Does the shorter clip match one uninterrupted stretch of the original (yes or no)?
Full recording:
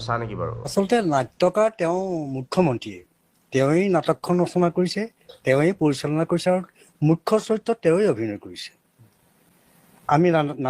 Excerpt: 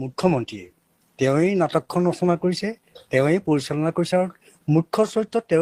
yes